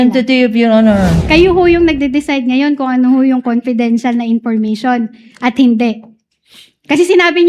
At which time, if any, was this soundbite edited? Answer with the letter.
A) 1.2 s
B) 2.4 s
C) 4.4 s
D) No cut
A